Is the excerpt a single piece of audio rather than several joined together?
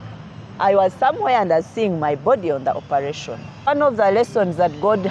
no; 1 cut; at 3.7 s

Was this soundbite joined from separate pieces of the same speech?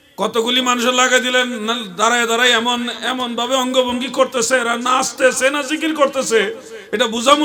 no; 0 cuts

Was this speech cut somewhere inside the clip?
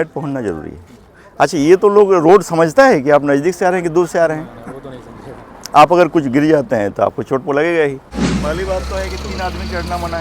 yes; 1 cut; at 8.2 s

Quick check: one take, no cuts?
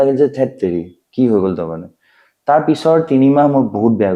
yes; 0 cuts

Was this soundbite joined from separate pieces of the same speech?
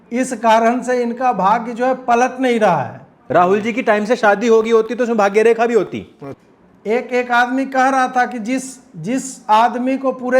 yes; 1 cut; at 3.2 s

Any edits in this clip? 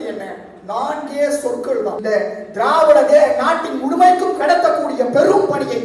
yes; 1 cut; at 2.0 s

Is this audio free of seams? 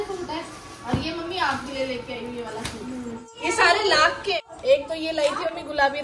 no; 2 cuts; at 3.3 s, 4.4 s

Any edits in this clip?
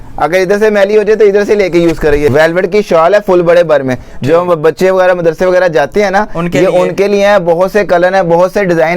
yes; 1 cut; at 2.3 s

